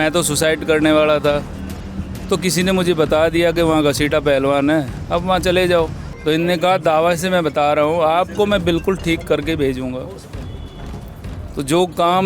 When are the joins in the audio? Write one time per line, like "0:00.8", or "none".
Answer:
0:06.1